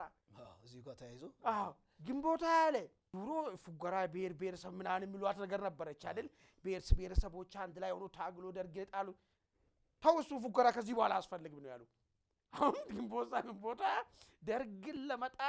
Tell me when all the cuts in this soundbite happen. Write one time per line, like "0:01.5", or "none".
0:03.0